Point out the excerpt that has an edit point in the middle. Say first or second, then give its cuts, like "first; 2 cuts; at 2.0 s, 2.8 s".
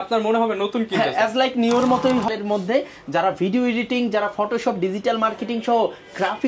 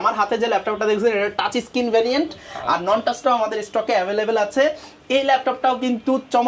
first; 1 cut; at 2.3 s